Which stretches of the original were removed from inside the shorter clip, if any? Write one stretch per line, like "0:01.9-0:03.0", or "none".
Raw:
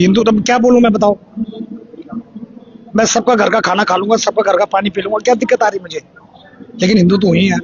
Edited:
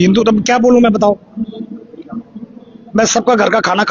none

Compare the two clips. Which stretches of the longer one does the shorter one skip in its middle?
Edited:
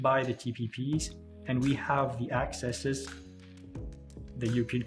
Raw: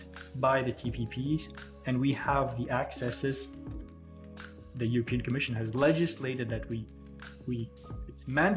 none

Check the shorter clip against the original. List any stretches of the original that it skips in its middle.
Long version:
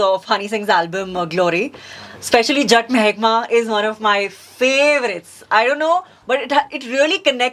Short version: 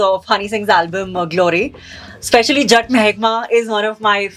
none

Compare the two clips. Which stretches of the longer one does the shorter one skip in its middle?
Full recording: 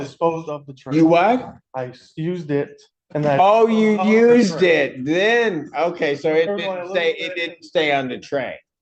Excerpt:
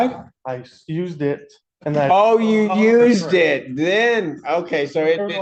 none

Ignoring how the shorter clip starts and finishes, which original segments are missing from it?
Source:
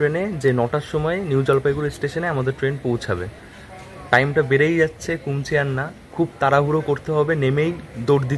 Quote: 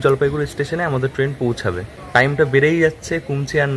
0:03.4-0:03.9

